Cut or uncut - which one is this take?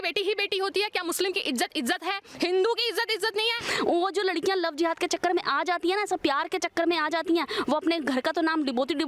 cut